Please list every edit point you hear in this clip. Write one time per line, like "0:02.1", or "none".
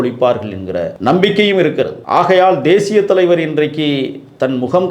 0:00.9
0:02.0